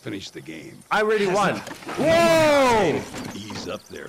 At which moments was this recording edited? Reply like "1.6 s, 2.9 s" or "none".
none

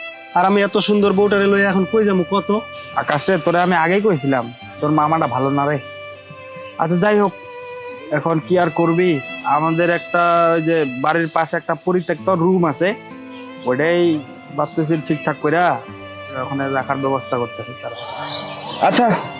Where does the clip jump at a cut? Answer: none

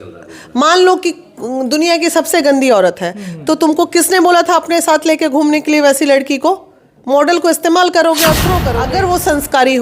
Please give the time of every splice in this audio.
8.6 s

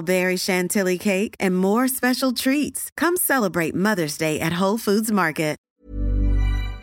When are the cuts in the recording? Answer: 5.6 s

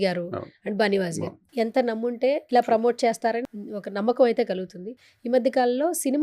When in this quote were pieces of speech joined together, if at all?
1.4 s, 2.4 s, 3.4 s

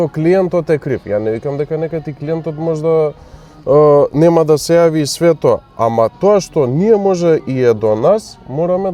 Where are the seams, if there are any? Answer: none

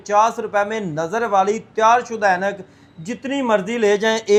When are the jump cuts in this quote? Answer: none

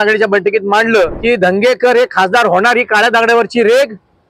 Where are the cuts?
1.2 s

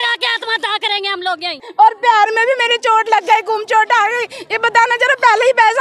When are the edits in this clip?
1.6 s

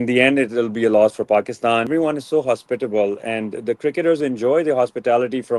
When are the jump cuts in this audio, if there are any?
1.9 s

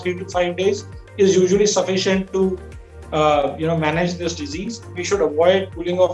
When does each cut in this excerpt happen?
5.0 s

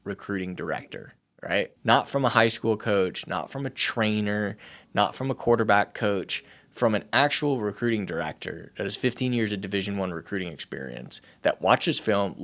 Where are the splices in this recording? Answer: 1.7 s

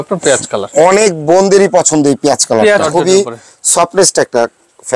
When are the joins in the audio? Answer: 2.8 s

